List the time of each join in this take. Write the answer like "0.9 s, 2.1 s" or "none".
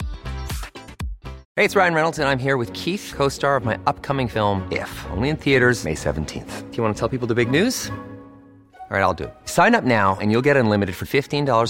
1.4 s